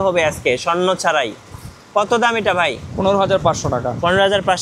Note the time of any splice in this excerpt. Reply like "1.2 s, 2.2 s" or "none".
none